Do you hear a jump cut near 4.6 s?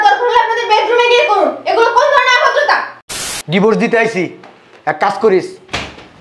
no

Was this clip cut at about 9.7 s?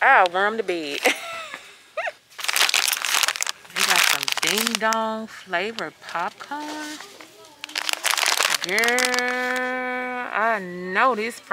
no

